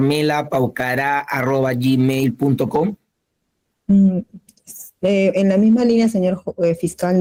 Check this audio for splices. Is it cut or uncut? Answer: uncut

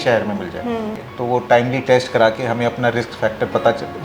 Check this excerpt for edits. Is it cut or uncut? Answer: cut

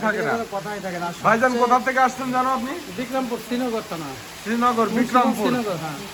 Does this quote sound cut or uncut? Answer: uncut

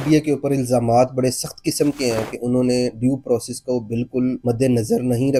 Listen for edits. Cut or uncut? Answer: uncut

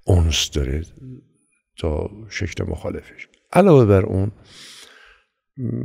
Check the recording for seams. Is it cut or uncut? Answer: uncut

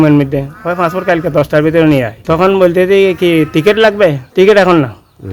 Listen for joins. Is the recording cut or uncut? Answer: cut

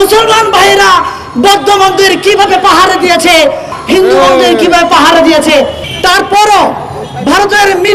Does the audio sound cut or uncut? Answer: cut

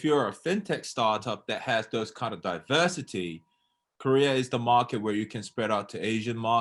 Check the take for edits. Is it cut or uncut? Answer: uncut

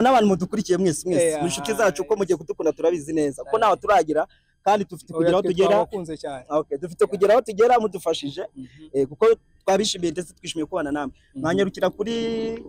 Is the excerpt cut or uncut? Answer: uncut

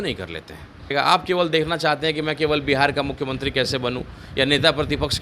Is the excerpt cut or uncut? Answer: cut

